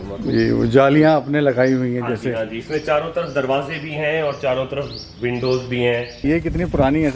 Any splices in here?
yes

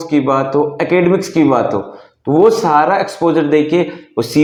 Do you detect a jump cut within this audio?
no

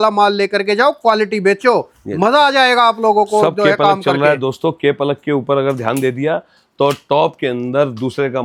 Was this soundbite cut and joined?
no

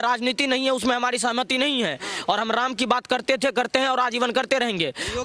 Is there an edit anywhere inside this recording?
no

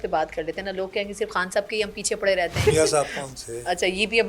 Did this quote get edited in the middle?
yes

